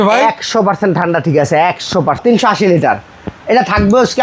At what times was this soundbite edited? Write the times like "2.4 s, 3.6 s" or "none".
2.2 s